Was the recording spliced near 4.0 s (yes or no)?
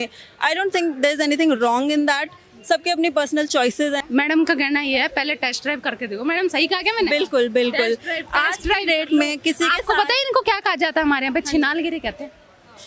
yes